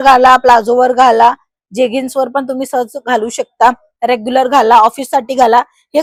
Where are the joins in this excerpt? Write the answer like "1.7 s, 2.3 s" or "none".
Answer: none